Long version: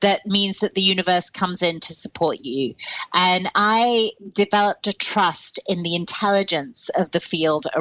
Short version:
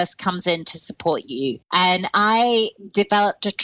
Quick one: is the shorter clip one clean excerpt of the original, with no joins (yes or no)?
no